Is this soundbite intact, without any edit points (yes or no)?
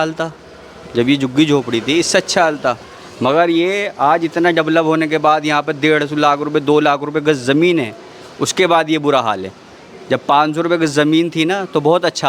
yes